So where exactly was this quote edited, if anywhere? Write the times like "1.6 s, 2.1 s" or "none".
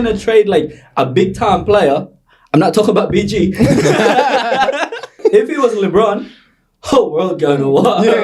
5.2 s